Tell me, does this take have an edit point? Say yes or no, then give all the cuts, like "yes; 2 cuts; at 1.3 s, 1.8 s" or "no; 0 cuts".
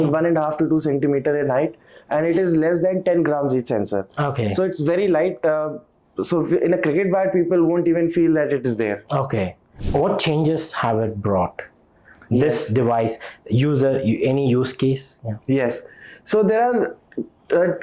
yes; 1 cut; at 9.8 s